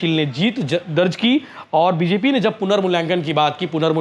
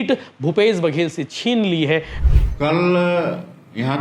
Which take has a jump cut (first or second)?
second